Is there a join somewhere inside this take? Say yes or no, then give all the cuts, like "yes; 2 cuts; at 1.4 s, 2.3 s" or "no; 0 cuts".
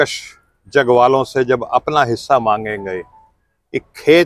no; 0 cuts